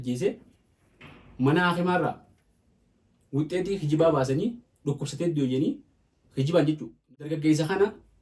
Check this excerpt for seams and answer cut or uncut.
cut